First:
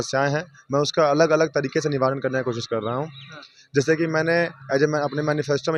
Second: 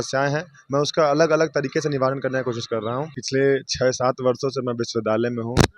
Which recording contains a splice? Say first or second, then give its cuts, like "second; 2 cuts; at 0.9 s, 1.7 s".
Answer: second; 1 cut; at 3.2 s